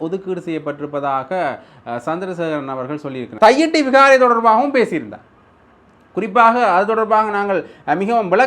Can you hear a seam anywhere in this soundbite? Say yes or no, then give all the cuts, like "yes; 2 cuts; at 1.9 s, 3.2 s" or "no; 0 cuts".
yes; 1 cut; at 3.3 s